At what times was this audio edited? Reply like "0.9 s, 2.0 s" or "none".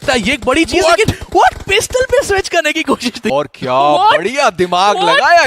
3.3 s